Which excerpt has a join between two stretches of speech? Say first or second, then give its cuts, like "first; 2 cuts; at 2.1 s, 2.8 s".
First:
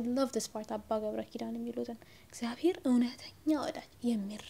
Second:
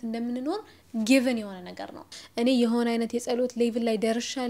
second; 1 cut; at 2.1 s